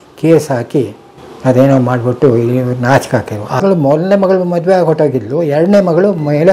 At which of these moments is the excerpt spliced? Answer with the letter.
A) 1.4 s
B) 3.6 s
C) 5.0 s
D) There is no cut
B